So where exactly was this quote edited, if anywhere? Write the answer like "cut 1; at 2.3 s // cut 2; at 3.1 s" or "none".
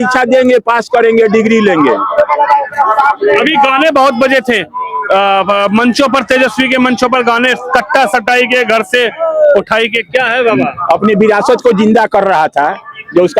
none